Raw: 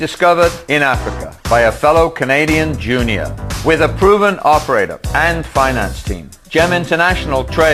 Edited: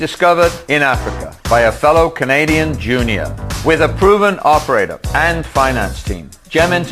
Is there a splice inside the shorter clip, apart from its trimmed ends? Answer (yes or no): no